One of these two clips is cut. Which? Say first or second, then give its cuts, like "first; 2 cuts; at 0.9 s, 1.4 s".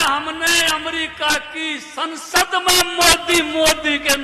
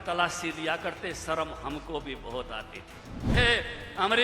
second; 1 cut; at 3.3 s